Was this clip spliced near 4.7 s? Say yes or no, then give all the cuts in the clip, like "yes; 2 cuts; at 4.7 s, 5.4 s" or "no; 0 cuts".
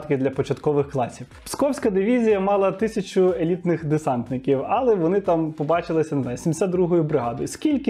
no; 1 cut; at 1.4 s